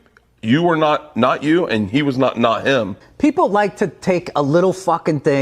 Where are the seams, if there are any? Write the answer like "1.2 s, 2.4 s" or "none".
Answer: 3.0 s